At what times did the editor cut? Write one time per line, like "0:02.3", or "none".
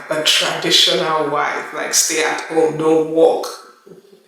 none